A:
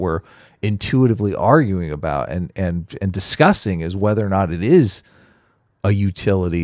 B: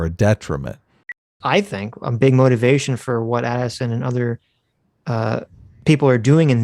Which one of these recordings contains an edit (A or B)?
B